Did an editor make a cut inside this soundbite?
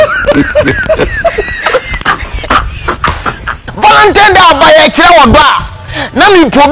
yes; 1 cut; at 3.8 s

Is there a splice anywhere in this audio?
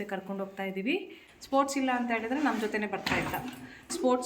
yes; 1 cut; at 1.2 s

